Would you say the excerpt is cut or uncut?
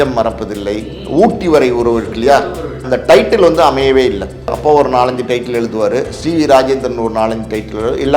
cut